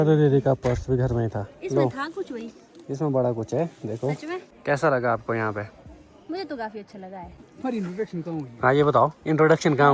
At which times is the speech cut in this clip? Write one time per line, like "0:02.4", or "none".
0:04.5
0:07.4